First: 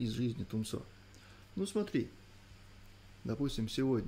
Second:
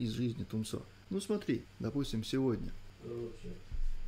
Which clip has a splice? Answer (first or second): second